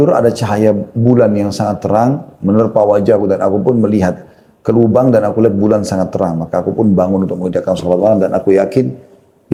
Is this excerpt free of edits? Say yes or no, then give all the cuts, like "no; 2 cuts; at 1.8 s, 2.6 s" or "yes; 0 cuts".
yes; 0 cuts